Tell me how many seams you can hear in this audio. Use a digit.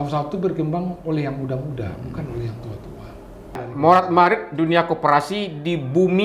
1